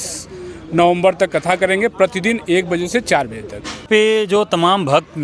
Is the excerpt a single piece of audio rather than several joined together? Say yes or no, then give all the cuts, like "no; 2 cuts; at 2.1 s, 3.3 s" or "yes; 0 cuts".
no; 1 cut; at 3.9 s